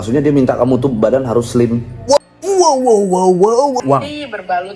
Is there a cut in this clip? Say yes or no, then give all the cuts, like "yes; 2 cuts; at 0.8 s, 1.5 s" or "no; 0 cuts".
yes; 1 cut; at 3.8 s